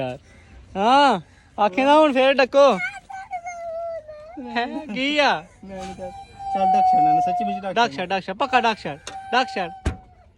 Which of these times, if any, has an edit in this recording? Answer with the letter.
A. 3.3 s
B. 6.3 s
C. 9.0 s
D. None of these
D